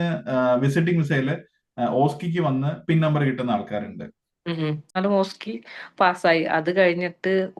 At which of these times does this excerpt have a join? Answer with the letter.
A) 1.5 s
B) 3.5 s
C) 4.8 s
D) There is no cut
C